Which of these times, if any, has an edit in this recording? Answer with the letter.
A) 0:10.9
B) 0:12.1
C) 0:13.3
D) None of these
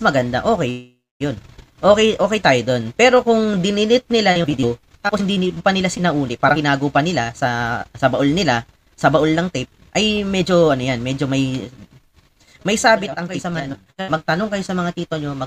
C